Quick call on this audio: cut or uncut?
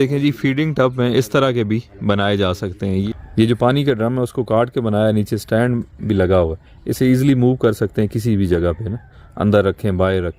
cut